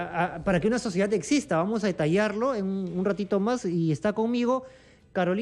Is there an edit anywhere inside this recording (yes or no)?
no